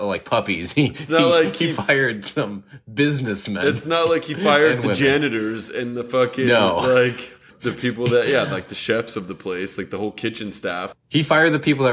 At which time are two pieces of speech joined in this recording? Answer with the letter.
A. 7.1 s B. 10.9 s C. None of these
B